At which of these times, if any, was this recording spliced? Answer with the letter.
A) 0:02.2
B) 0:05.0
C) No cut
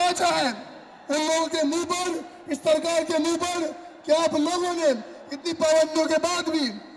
C